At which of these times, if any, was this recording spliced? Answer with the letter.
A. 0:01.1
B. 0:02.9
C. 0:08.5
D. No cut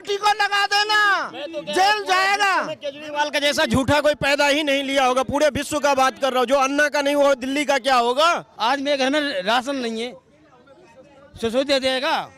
C